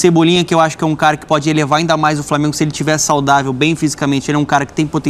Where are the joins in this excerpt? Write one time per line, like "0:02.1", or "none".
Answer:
none